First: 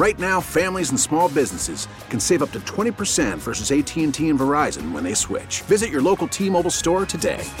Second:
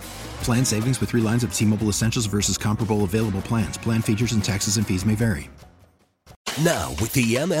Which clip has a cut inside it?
second; 1 cut; at 6.4 s

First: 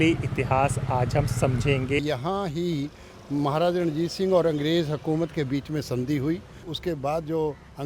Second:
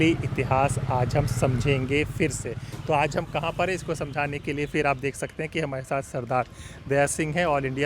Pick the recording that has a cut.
first; 2 cuts; at 2.0 s, 6.6 s

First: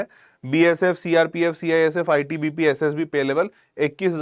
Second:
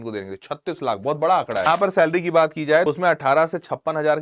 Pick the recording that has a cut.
second; 2 cuts; at 1.7 s, 2.9 s

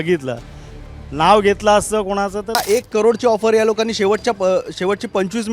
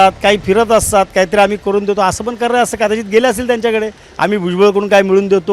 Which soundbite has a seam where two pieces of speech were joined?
first; 1 cut; at 2.6 s

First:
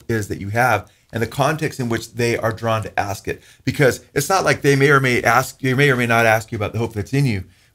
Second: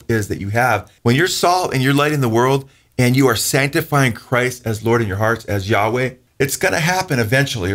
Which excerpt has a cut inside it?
second; 2 cuts; at 0.9 s, 6.2 s

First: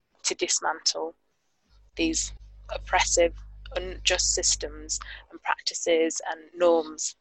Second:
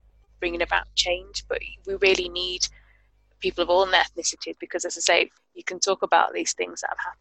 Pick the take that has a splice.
second; 1 cut; at 5.4 s

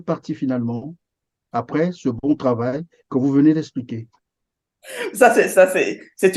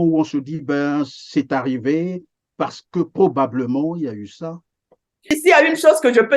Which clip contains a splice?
second; 1 cut; at 5.2 s

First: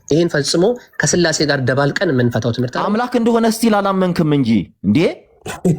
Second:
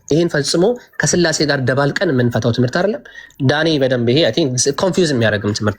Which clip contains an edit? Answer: first; 1 cut; at 2.7 s

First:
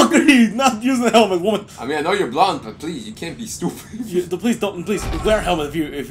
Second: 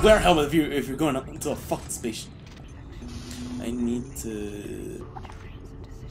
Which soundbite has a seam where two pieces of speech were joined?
second; 1 cut; at 2.7 s

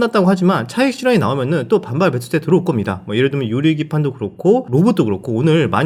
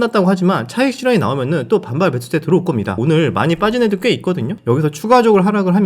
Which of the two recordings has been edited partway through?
second; 2 cuts; at 2.9 s, 4.6 s

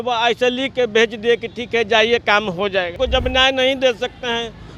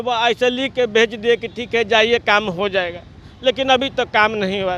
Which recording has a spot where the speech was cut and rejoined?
first; 1 cut; at 2.9 s

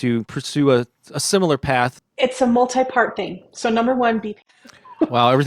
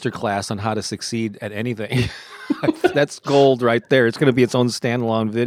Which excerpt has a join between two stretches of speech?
first; 2 cuts; at 2.0 s, 4.3 s

